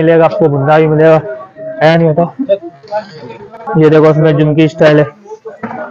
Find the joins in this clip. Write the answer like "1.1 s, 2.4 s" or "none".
3.6 s